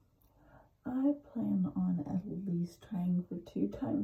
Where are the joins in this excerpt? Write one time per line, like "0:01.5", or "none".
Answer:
none